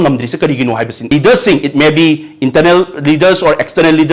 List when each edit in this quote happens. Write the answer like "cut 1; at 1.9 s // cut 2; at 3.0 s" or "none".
cut 1; at 1.1 s